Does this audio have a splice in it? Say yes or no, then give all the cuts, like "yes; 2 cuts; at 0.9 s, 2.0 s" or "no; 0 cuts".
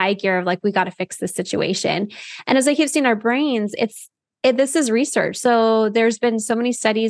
no; 0 cuts